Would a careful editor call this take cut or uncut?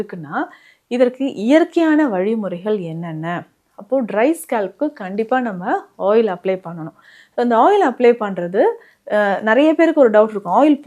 uncut